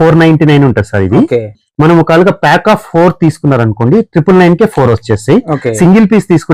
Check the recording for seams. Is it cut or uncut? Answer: uncut